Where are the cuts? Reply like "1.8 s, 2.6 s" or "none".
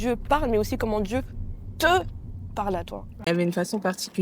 3.3 s